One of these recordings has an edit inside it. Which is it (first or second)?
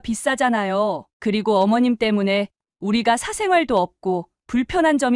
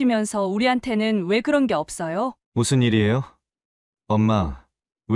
second